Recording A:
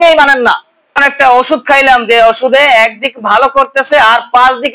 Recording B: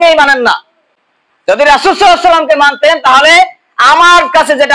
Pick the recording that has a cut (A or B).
A